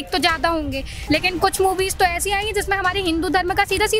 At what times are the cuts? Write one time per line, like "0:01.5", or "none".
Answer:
0:00.9